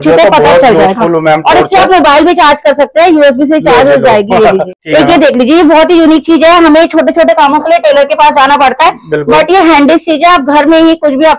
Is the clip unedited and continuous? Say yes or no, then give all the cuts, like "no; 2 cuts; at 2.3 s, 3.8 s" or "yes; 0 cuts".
no; 1 cut; at 4.8 s